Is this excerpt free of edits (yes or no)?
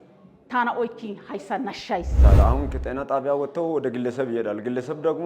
no